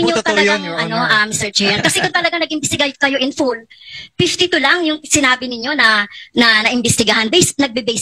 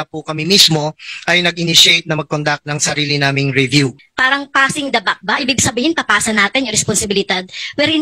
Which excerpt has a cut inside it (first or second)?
second